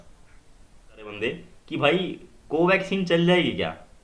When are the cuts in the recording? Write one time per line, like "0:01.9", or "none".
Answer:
0:01.1